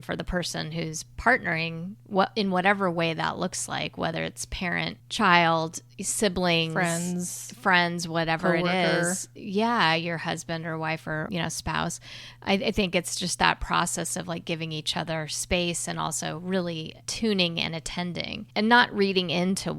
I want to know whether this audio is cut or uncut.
cut